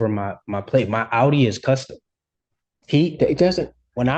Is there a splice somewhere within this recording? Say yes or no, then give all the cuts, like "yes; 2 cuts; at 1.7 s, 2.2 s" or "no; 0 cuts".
no; 0 cuts